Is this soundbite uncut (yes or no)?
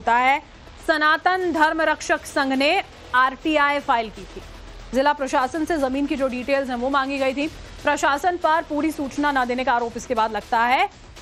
yes